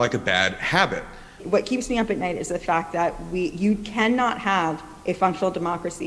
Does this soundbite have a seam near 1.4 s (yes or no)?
yes